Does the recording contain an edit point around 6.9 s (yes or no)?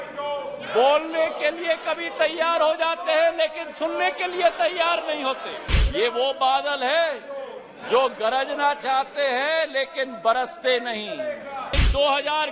no